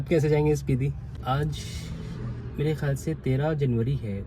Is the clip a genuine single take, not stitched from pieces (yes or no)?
no